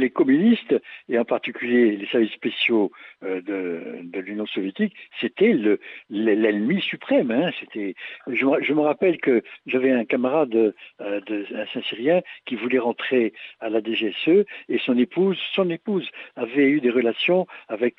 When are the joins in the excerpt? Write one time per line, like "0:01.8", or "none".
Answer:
none